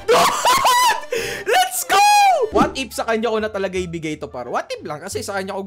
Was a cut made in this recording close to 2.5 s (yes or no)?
yes